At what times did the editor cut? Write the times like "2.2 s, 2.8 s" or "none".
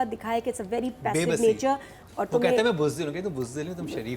2.0 s

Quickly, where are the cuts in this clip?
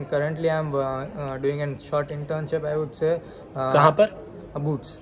none

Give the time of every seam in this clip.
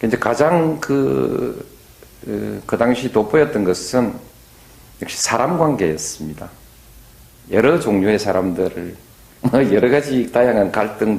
none

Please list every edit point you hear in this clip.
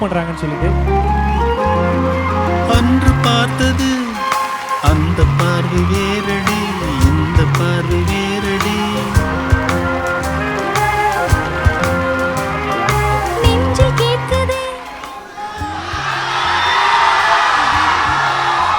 none

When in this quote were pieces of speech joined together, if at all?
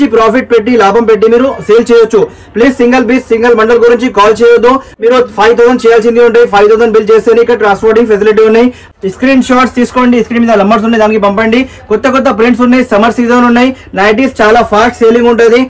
4.9 s, 8.9 s

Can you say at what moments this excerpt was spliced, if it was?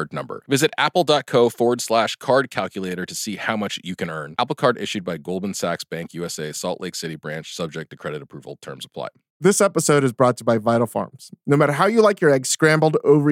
9.2 s

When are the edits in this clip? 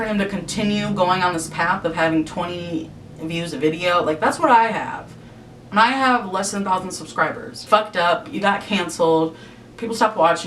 7.5 s

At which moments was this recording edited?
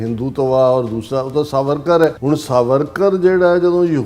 2.2 s

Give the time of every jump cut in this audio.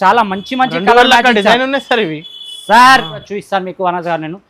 3.3 s

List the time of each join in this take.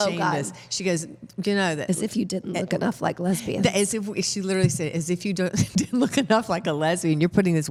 none

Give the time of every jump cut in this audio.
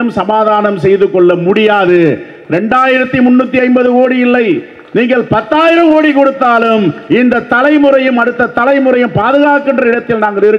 none

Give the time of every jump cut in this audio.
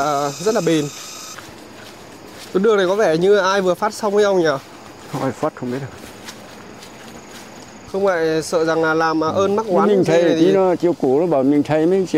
1.3 s, 7.7 s

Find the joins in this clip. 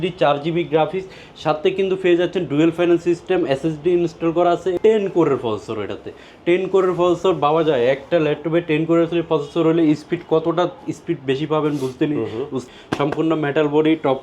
4.8 s, 12.6 s

